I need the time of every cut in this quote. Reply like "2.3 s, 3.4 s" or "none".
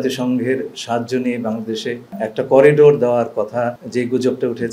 2.2 s, 3.8 s